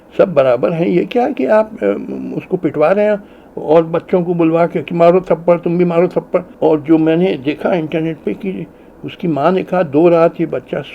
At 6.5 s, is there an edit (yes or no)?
yes